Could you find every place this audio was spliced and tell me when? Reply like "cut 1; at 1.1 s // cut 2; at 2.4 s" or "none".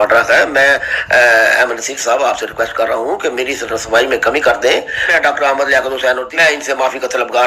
cut 1; at 5.1 s // cut 2; at 6.3 s